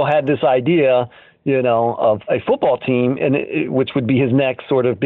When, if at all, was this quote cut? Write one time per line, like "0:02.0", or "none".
0:02.2